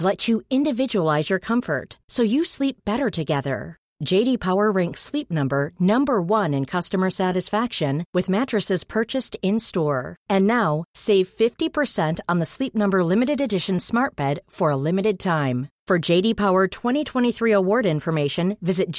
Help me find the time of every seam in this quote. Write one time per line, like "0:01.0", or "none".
none